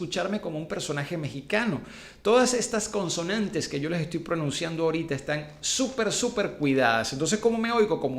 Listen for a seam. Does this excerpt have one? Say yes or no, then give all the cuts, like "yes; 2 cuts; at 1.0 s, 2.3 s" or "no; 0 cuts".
no; 0 cuts